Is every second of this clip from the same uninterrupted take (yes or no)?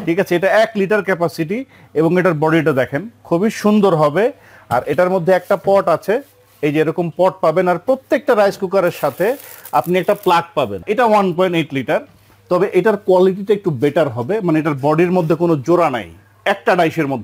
no